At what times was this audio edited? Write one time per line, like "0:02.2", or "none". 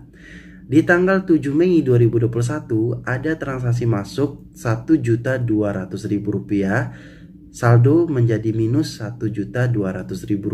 none